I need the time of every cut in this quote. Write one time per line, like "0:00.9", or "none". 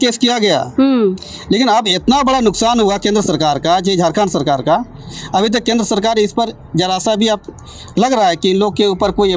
none